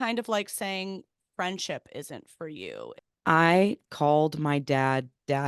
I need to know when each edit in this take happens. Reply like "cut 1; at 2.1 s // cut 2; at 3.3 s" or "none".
cut 1; at 2.9 s